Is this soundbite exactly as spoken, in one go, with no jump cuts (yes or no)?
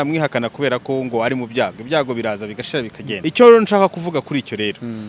no